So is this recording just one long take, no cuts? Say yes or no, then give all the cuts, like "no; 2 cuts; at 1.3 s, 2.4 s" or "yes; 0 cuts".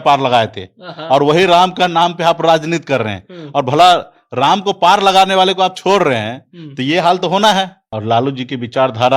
no; 1 cut; at 7.9 s